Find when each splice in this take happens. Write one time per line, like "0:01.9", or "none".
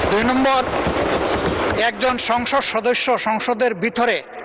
none